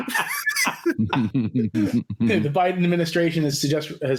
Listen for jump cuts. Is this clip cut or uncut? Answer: uncut